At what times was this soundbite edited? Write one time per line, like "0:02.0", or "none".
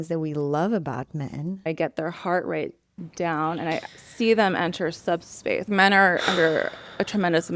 0:01.7
0:04.0
0:05.7